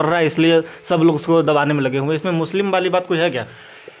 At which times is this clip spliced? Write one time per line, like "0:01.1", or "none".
none